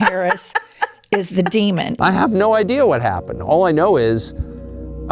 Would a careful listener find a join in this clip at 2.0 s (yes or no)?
yes